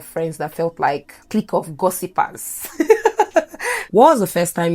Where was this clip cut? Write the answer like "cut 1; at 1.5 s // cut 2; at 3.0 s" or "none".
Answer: cut 1; at 1.1 s // cut 2; at 3.8 s